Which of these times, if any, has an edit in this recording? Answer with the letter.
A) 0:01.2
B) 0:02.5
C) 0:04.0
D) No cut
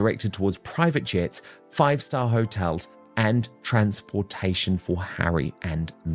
D